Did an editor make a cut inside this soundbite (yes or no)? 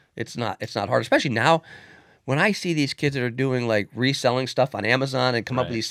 no